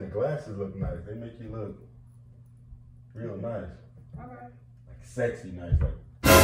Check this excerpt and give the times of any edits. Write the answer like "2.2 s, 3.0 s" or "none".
none